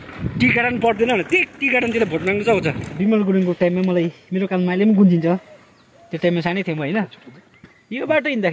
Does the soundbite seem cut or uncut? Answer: cut